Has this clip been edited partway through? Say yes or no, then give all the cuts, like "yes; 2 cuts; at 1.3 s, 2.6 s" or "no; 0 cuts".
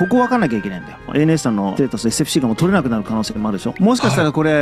yes; 2 cuts; at 1.1 s, 3.7 s